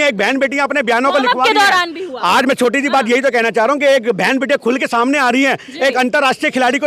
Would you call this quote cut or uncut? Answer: uncut